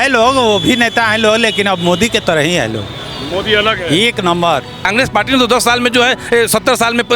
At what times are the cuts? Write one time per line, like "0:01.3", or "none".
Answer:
0:04.8